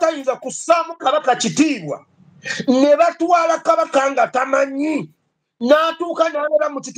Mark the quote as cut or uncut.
cut